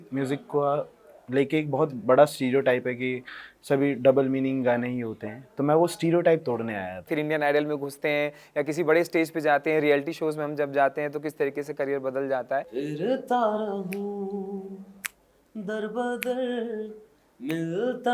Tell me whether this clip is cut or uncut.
cut